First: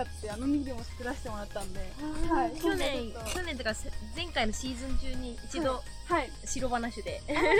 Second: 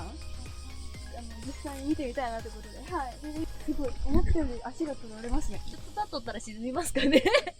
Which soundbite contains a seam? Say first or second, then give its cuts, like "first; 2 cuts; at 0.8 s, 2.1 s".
second; 2 cuts; at 3.5 s, 5.7 s